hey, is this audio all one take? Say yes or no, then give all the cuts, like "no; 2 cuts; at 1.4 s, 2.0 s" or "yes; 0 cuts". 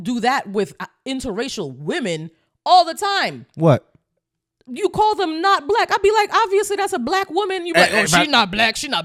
yes; 0 cuts